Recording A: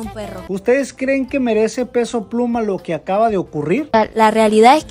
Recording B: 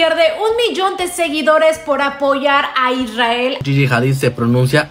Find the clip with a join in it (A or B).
A